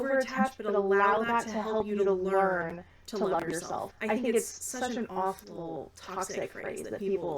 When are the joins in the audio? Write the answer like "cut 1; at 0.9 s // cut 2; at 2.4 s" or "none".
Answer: cut 1; at 3.9 s